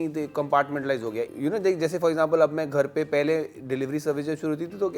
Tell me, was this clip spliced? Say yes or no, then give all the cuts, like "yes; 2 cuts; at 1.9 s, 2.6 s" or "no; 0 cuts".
yes; 1 cut; at 1.3 s